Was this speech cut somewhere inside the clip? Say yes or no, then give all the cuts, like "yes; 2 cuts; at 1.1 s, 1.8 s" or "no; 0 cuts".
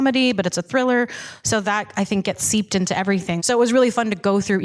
yes; 1 cut; at 3.3 s